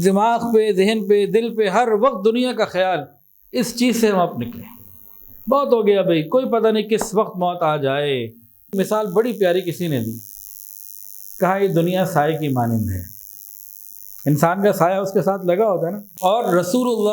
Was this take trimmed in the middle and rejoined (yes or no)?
yes